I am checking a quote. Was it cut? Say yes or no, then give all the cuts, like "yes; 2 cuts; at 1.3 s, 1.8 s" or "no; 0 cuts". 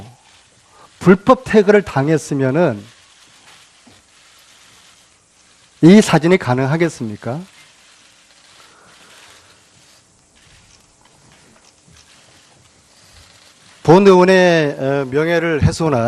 no; 0 cuts